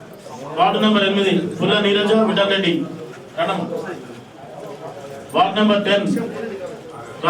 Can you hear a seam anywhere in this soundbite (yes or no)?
no